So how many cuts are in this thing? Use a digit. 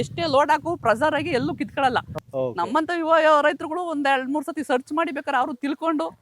1